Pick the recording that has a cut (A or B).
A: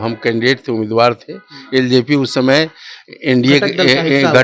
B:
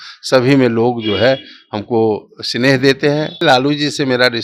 B